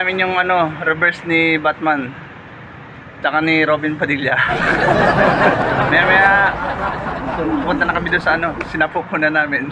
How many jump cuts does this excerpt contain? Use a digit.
1